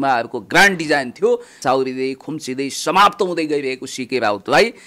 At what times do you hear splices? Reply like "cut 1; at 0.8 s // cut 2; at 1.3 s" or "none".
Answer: cut 1; at 1.6 s